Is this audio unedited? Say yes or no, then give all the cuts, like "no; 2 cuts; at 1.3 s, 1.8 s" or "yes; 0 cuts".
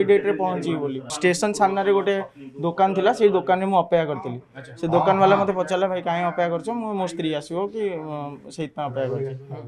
no; 1 cut; at 1.1 s